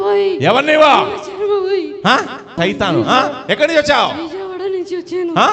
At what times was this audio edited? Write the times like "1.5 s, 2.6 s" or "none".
2.5 s